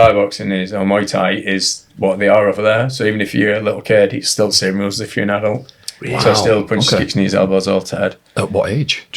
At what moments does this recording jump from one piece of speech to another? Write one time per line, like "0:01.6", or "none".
none

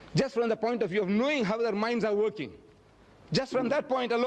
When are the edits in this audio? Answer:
0:03.2

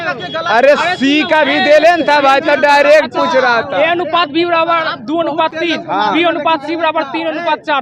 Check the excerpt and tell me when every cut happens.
none

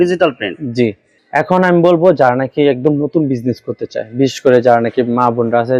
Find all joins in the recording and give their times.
none

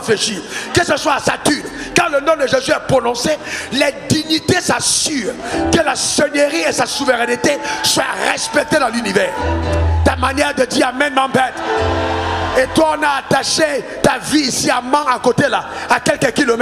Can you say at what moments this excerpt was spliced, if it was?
none

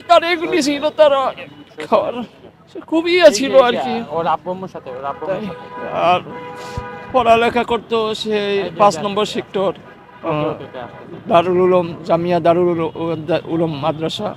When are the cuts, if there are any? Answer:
none

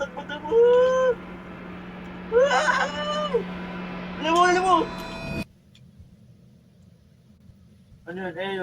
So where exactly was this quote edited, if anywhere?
0:07.4

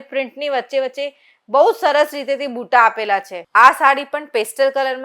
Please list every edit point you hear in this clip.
0:03.4

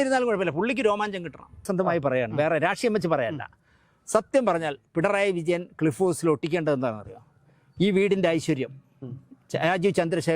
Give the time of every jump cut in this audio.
0:01.7

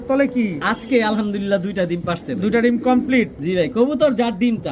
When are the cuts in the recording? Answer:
none

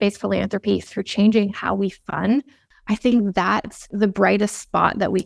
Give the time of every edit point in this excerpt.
0:02.6
0:03.9

